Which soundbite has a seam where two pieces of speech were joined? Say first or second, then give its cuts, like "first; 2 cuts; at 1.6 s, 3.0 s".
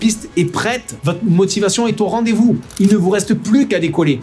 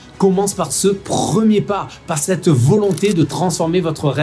first; 2 cuts; at 0.9 s, 2.7 s